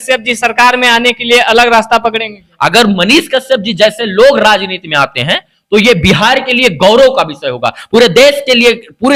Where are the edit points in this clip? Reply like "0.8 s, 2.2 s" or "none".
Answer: none